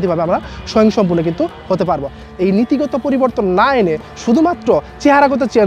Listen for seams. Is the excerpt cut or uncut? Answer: cut